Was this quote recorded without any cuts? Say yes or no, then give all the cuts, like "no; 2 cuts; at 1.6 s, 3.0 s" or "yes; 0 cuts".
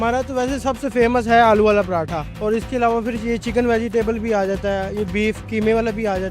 no; 1 cut; at 2.2 s